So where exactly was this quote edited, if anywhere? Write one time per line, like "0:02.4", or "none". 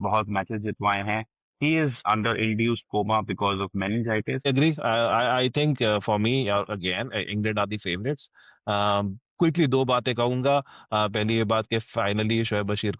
0:02.0
0:04.5